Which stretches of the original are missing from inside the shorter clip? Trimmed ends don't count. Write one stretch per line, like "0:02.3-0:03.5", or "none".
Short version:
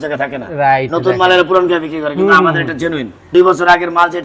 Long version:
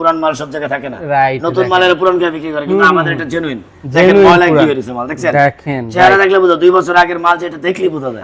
0:03.8-0:06.6

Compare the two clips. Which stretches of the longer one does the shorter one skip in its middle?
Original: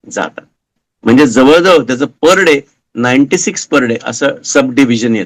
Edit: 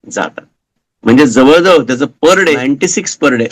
0:02.6-0:03.1

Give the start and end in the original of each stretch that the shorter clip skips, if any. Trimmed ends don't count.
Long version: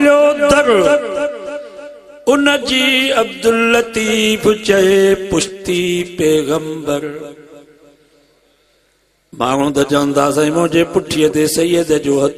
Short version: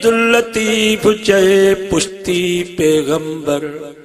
none

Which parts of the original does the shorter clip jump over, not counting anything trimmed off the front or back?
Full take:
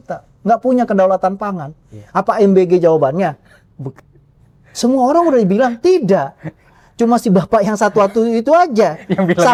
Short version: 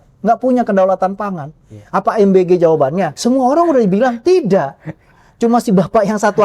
0:03.4-0:04.7

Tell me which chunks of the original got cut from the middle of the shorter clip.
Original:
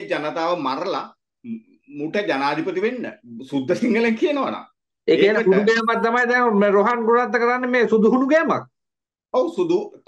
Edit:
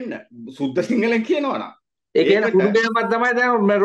none

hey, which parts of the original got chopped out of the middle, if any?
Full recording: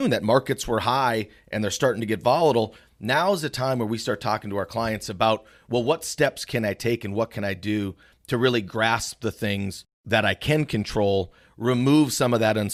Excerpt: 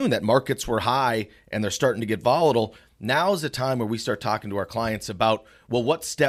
none

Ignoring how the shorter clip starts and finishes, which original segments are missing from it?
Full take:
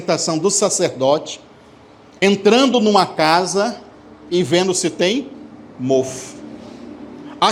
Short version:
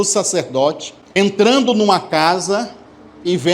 0:01.4-0:02.0

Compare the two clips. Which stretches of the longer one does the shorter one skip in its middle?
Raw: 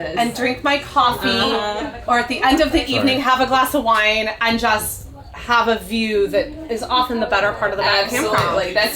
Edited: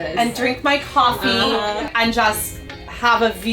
0:01.9-0:04.4

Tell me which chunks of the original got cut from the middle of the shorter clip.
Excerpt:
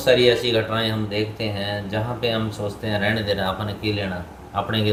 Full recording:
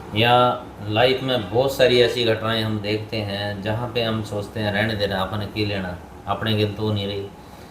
none

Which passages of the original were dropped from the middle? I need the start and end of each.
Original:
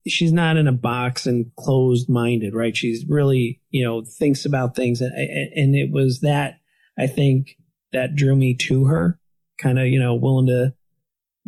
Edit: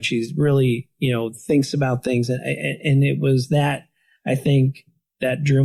none

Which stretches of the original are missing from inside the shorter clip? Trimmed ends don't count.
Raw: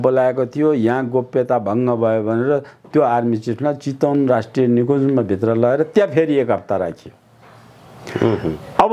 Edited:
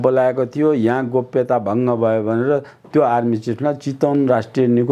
none

